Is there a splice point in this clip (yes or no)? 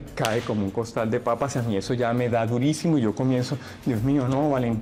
no